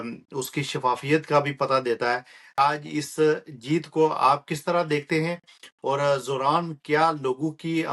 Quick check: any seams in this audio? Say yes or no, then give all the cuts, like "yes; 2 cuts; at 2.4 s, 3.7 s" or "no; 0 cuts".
yes; 1 cut; at 2.6 s